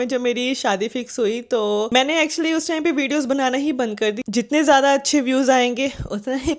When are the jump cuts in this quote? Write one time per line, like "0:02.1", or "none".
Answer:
0:01.9
0:04.2

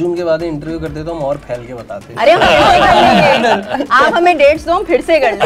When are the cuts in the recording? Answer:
none

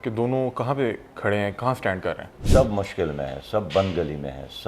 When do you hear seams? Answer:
0:02.4

